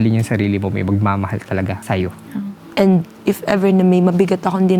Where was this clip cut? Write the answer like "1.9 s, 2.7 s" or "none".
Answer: 2.6 s